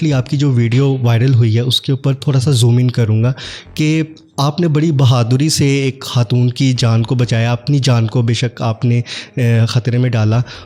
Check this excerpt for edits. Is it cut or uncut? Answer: uncut